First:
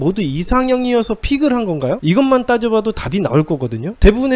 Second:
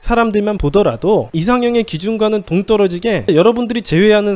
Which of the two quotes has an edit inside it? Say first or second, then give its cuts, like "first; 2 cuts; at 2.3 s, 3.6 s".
second; 2 cuts; at 1.3 s, 3.3 s